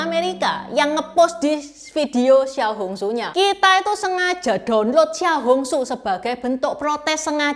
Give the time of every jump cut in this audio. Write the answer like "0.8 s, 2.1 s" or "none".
3.3 s

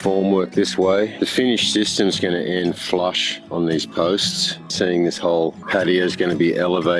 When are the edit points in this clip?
1.1 s, 4.7 s

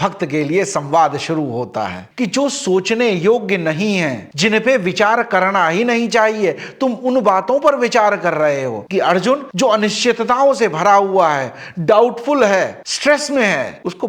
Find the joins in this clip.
2.0 s, 8.8 s

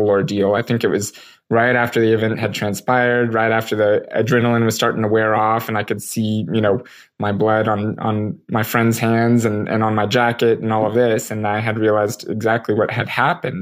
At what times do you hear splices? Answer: none

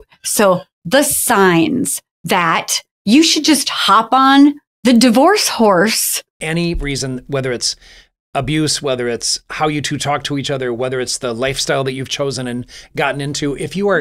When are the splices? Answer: 6.3 s

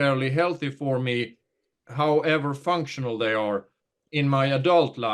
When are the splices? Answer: 1.8 s, 4.0 s

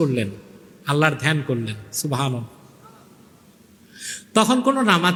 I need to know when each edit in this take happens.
none

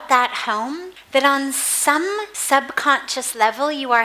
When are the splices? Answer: 0.9 s, 2.3 s

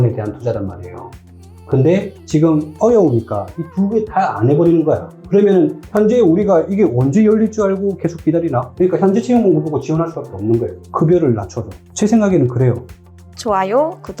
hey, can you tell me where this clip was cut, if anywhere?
5.1 s, 12.9 s

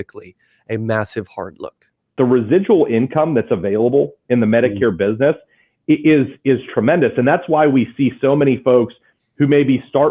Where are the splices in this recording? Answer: 2.1 s

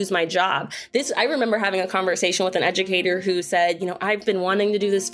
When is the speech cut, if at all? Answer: none

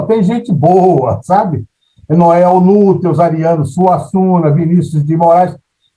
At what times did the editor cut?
none

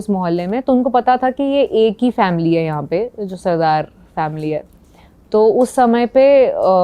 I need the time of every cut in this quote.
none

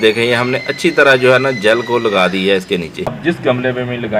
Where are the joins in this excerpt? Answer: 3.2 s

